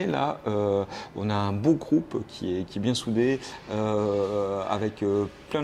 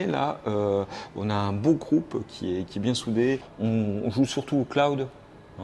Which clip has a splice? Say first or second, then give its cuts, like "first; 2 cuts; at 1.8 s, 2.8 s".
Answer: second; 1 cut; at 3.5 s